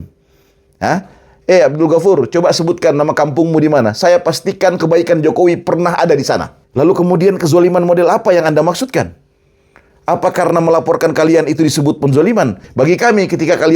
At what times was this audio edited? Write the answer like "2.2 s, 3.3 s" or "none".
6.6 s, 12.6 s